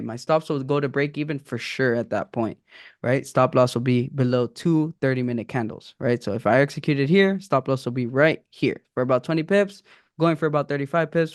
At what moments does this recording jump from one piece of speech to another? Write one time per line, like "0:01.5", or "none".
none